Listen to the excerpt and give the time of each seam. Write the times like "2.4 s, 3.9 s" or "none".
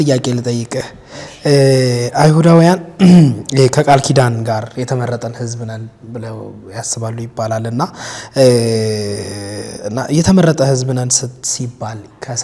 none